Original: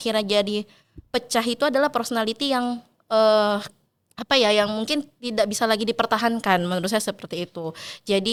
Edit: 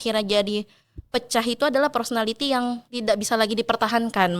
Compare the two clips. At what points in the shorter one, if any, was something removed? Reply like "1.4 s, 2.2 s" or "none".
2.9 s